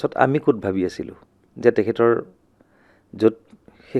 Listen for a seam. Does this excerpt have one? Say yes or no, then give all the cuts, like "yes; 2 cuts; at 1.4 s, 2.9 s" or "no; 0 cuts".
no; 0 cuts